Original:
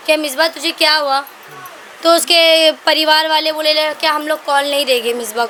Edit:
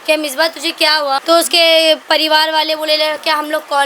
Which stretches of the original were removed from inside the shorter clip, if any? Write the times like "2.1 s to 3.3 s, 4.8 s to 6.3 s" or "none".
1.2 s to 2.0 s